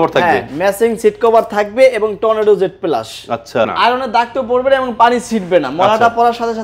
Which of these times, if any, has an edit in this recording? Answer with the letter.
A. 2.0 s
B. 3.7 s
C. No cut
B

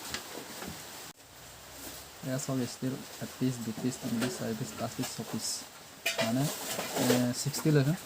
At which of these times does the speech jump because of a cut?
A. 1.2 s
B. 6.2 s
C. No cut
A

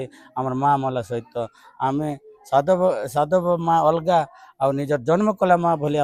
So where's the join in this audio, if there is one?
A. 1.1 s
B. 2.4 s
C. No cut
C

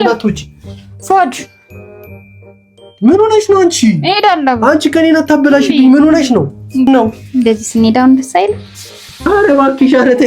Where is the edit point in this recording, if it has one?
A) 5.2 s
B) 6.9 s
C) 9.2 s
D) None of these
B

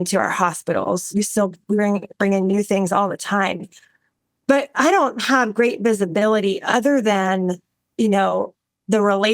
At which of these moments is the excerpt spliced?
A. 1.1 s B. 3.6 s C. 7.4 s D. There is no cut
A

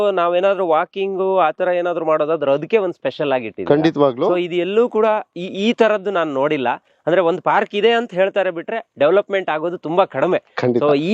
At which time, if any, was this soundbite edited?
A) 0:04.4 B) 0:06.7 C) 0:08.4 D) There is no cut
D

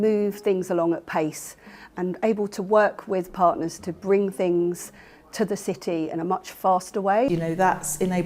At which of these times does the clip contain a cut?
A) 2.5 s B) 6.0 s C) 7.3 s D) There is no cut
C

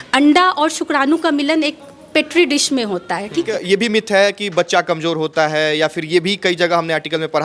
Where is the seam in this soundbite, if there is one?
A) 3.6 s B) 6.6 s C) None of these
A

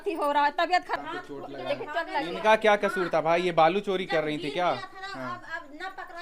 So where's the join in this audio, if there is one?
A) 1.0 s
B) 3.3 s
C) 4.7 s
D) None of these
A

